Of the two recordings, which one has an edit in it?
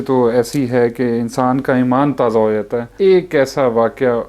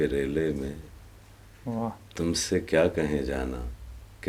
first; 1 cut; at 2.9 s

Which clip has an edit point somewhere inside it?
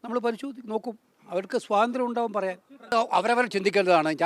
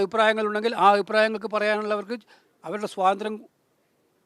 first; 1 cut; at 2.9 s

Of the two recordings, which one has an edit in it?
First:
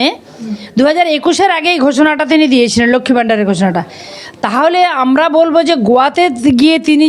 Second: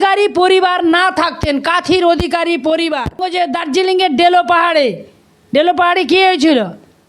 second; 1 cut; at 3.3 s

